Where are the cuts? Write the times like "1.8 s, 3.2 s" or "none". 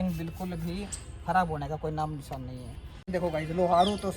3.1 s